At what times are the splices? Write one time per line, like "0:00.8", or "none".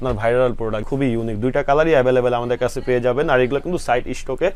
none